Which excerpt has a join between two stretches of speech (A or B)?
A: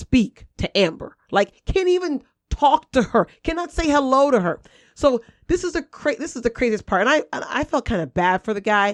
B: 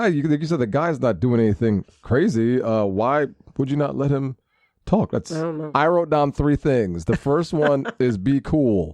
B